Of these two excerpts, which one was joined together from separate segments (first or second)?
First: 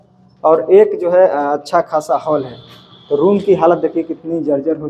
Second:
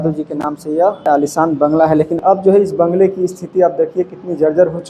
second